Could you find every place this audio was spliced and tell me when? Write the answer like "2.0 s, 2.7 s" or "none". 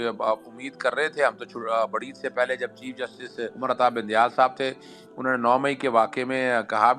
3.5 s